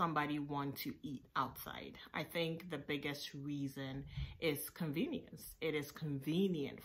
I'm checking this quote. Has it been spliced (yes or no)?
no